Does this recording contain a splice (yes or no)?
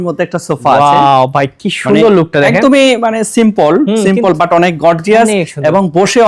no